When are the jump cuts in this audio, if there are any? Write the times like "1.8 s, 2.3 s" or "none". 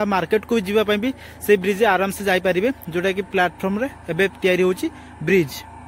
none